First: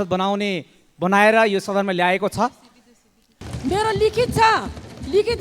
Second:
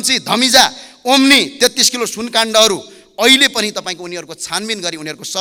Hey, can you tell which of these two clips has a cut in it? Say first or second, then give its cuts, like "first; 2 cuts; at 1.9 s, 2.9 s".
first; 1 cut; at 3.4 s